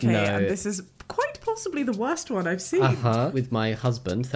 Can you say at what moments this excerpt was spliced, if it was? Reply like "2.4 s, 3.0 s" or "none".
3.3 s